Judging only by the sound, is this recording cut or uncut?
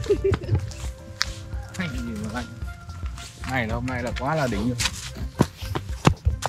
uncut